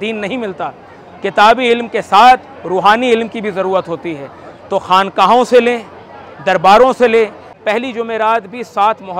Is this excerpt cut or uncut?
cut